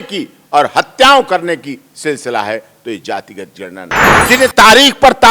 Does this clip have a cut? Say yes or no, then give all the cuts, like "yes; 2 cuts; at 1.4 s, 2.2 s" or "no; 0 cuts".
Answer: yes; 1 cut; at 4.2 s